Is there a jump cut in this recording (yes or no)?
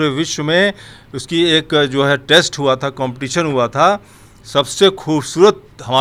no